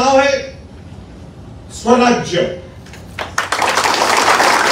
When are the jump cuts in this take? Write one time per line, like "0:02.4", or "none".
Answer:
none